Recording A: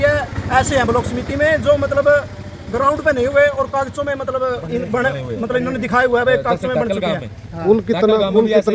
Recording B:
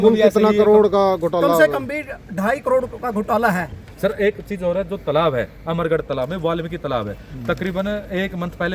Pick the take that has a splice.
B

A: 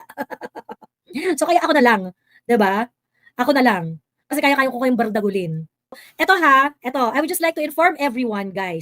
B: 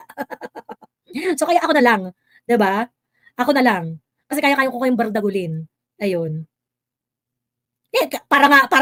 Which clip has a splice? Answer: A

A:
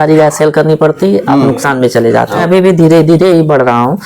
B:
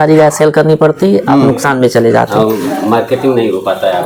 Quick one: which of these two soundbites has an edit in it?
A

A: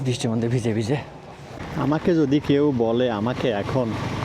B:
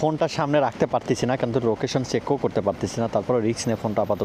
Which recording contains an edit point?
A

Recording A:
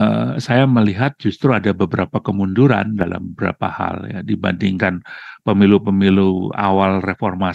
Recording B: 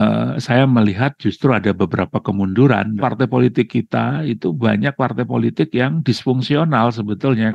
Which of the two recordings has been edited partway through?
B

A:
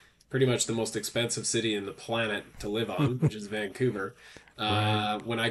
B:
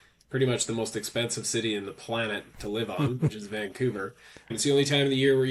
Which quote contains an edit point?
B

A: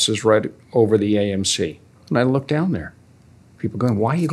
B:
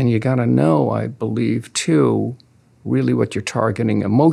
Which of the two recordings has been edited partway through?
A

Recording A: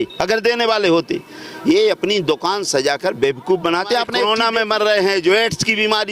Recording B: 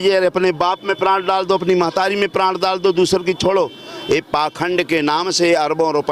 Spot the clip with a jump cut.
A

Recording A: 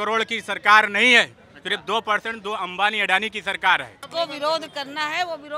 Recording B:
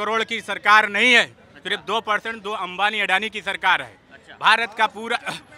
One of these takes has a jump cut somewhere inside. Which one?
A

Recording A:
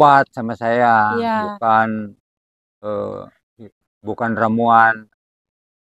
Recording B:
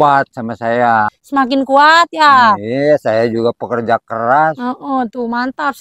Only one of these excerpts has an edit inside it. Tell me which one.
B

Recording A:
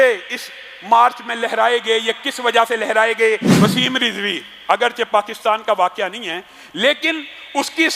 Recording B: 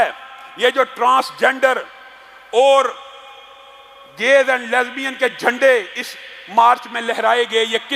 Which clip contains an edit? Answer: A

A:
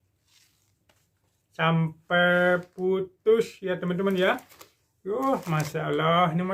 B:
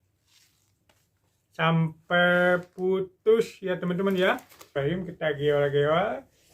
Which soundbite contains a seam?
B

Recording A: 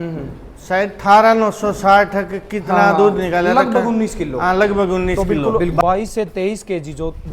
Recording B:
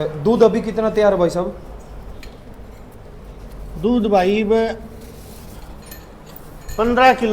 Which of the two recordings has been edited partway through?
A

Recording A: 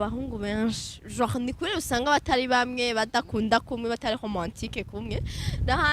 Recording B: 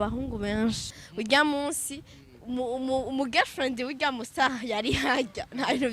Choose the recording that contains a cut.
B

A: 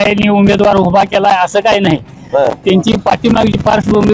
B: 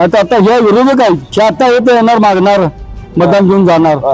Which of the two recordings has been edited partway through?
B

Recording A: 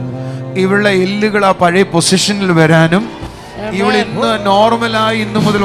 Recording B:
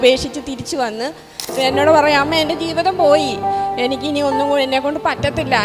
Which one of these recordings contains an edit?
B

